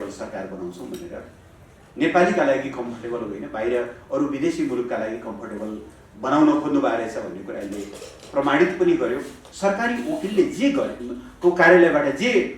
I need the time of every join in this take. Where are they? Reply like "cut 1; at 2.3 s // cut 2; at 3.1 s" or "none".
cut 1; at 9.4 s

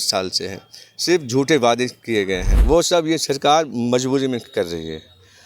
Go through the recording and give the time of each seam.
cut 1; at 2.5 s

